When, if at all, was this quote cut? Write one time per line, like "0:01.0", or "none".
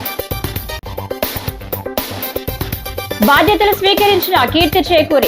none

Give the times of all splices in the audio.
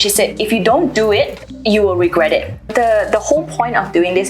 0:01.5
0:02.7

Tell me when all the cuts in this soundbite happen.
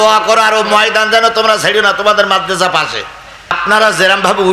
0:03.6

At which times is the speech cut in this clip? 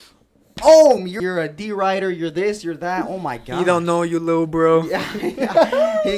0:01.2

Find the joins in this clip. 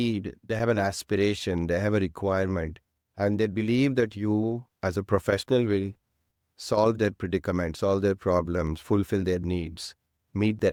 none

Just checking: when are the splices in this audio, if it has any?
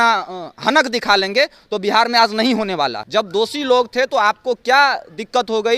0:03.0

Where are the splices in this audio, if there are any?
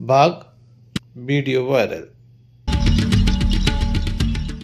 0:02.7

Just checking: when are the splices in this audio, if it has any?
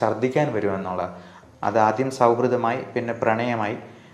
0:01.3

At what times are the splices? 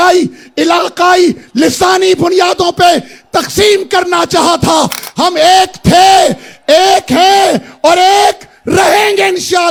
none

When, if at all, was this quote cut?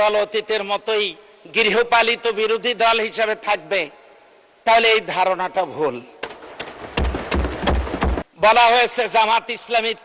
0:08.2

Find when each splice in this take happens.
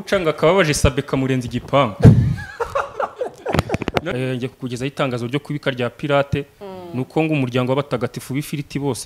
0:04.1

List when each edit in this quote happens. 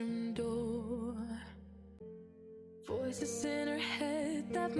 0:02.0

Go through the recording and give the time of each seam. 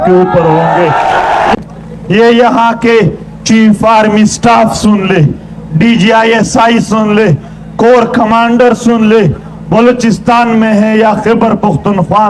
0:01.5

